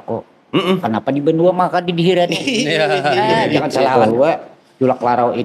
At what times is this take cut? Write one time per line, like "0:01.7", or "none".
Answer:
0:03.9